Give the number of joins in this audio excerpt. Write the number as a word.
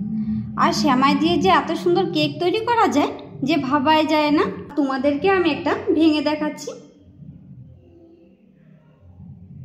one